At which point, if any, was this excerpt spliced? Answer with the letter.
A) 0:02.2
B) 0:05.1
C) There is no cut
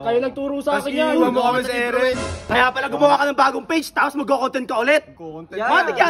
A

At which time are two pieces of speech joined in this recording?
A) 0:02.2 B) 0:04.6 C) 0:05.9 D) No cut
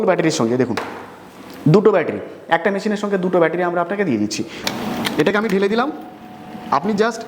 B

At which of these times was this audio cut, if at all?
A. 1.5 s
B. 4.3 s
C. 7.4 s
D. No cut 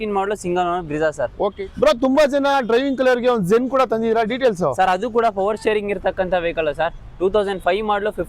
A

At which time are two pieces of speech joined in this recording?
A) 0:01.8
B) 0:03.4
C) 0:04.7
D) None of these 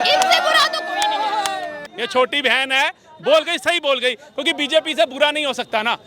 A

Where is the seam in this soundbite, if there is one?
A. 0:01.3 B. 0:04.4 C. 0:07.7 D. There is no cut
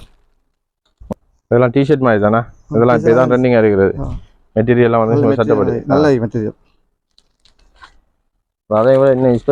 C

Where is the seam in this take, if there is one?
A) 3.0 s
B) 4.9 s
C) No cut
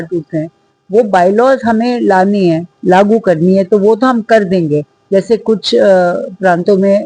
C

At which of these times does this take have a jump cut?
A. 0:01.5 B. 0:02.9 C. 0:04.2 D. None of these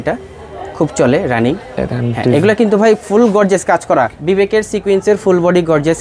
C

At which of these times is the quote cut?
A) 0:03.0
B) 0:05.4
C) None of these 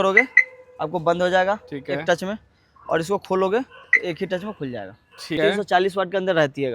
B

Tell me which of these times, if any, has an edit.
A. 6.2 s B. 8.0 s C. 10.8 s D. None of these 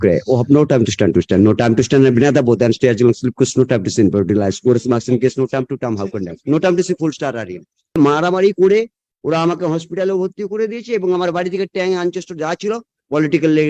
B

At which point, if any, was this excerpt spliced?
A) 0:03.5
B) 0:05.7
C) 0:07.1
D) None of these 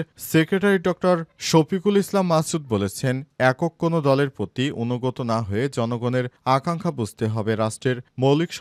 D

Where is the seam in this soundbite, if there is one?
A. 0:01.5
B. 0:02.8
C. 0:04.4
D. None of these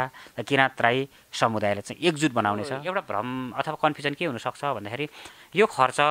B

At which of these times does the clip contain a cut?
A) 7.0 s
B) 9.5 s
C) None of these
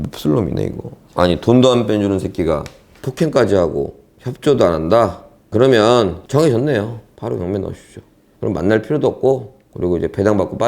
A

